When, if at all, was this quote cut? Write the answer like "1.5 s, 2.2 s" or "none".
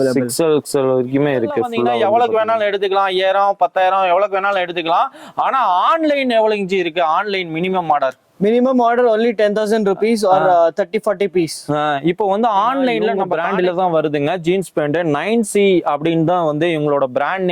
1.9 s, 13.3 s